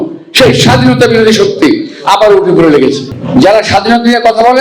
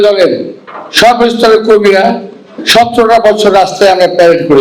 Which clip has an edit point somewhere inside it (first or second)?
first